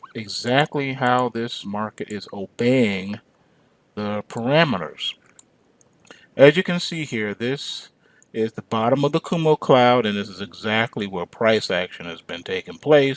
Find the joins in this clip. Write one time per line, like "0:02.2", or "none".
0:08.2